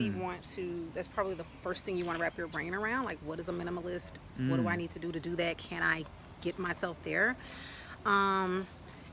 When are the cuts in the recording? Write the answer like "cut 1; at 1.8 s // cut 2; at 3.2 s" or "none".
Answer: none